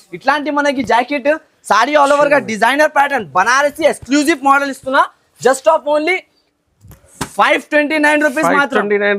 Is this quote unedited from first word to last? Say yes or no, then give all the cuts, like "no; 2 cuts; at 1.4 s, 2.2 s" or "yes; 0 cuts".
yes; 0 cuts